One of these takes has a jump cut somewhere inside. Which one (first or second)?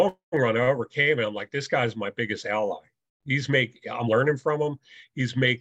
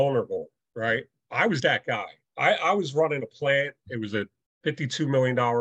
second